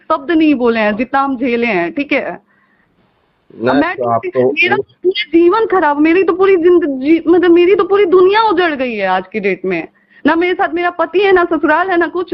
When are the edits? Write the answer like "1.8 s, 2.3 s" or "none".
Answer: none